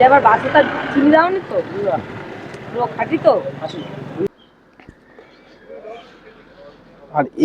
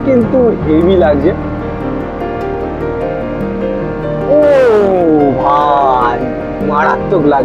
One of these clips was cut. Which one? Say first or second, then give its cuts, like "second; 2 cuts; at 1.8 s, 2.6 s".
first; 1 cut; at 4.3 s